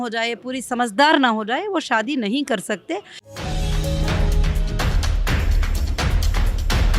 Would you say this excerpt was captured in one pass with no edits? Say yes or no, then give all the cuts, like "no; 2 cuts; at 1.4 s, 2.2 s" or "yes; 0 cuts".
no; 1 cut; at 3.2 s